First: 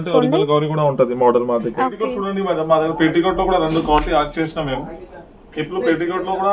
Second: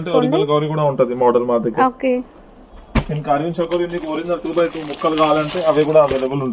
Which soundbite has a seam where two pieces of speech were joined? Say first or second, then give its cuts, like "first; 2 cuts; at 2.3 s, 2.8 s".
first; 1 cut; at 2.1 s